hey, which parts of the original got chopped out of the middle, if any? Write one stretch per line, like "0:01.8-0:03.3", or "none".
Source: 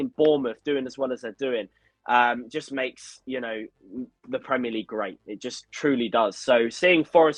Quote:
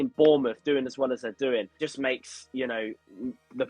0:01.8-0:02.5